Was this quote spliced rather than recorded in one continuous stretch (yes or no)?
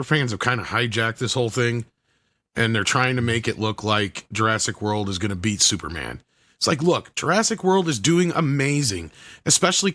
no